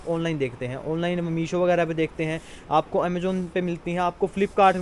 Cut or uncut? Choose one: uncut